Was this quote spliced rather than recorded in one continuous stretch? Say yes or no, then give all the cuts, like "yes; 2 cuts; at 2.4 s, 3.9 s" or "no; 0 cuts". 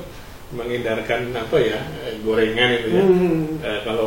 no; 0 cuts